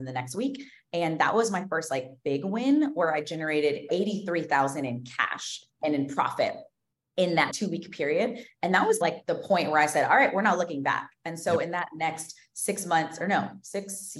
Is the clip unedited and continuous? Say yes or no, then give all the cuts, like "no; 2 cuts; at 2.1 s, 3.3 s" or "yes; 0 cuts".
no; 4 cuts; at 3.9 s, 5.7 s, 7.5 s, 9.0 s